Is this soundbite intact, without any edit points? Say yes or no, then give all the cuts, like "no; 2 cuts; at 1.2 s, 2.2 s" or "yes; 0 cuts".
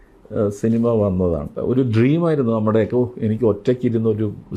no; 1 cut; at 1.5 s